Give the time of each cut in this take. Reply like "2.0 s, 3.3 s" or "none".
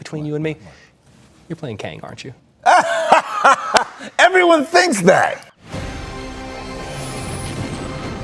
5.5 s